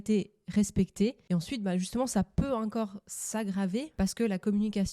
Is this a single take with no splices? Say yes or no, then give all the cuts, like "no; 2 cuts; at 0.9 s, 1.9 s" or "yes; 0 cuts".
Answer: no; 2 cuts; at 1.2 s, 3.9 s